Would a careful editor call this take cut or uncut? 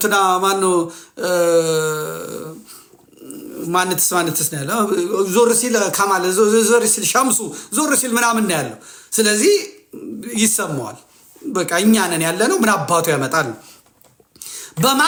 uncut